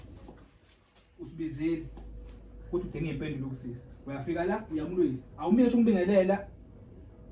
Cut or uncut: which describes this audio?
uncut